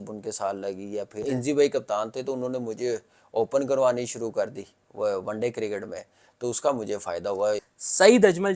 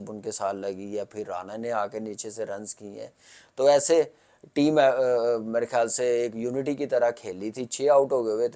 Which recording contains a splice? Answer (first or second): first